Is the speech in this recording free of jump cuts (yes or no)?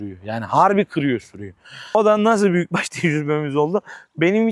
no